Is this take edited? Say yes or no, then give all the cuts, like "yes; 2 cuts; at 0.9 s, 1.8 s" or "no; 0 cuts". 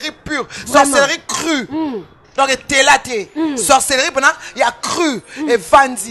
no; 0 cuts